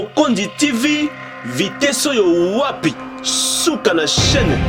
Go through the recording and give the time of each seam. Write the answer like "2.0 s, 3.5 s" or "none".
none